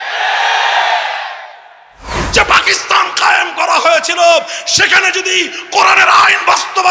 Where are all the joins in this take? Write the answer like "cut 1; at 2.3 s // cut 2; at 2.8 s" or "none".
cut 1; at 2.2 s

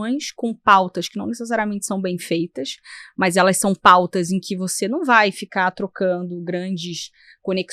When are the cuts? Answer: none

